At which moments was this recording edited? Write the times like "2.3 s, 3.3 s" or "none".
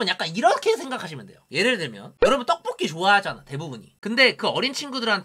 3.9 s